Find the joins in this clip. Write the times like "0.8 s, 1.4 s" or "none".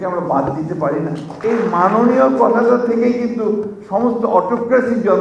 1.3 s